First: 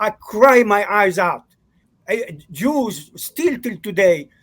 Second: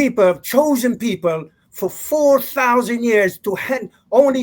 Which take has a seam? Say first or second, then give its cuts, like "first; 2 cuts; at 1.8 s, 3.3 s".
first; 1 cut; at 1.9 s